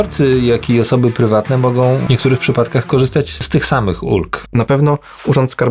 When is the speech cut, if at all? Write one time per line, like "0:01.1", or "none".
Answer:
0:02.0
0:03.4
0:04.4